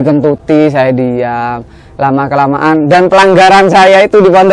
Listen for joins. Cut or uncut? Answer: uncut